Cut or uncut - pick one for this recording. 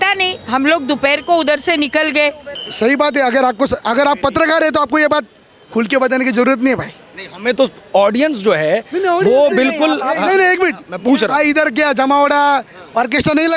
cut